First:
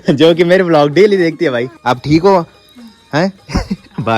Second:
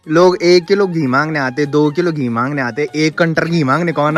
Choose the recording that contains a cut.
first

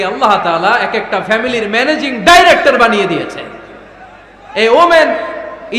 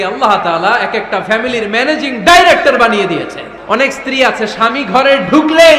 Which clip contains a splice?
second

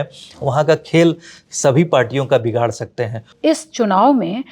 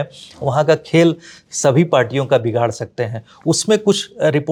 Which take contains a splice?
first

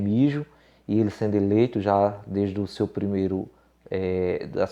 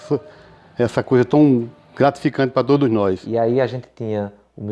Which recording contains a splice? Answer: second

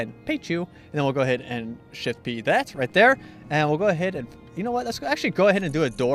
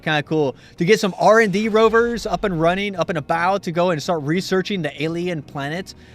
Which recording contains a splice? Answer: second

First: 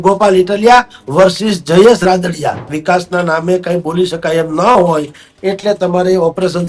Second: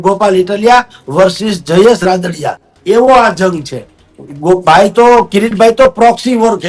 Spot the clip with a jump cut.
first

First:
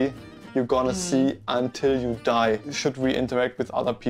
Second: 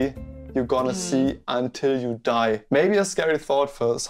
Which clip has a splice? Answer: first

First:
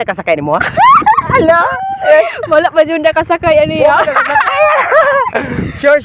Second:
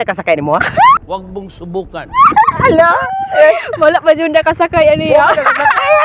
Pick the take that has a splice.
first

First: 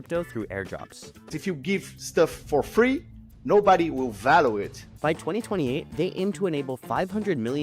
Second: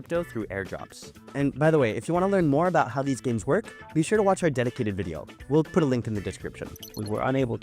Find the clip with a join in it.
first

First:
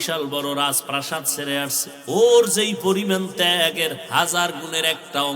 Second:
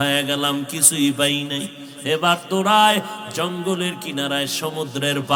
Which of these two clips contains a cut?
first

